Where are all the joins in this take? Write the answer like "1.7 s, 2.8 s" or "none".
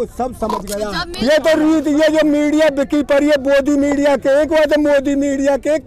1.0 s